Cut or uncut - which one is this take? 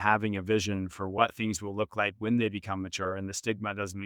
cut